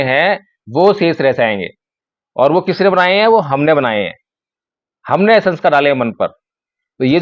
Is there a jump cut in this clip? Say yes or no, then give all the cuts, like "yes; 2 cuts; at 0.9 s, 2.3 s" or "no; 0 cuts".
no; 0 cuts